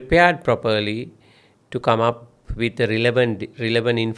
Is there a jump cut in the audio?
no; 0 cuts

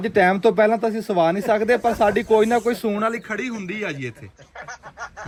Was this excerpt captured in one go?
yes; 0 cuts

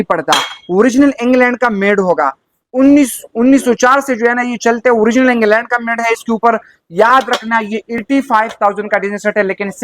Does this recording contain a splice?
no; 0 cuts

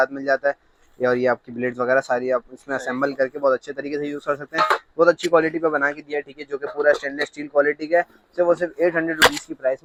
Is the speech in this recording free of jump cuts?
yes; 0 cuts

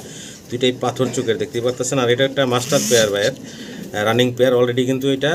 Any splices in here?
no; 0 cuts

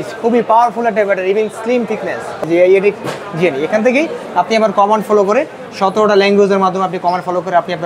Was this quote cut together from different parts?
yes; 1 cut; at 2.4 s

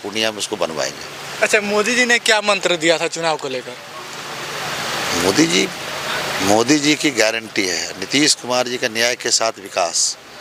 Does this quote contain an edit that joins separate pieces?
no; 0 cuts

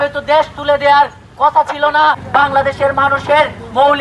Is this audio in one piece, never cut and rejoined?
no; 1 cut; at 2.2 s

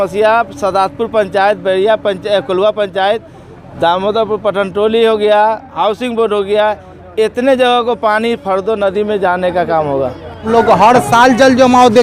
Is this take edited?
yes; 1 cut; at 10.5 s

